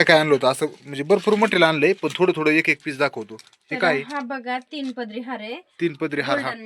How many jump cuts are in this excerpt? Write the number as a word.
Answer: zero